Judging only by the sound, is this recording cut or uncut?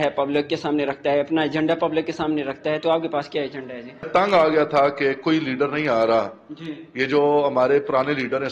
cut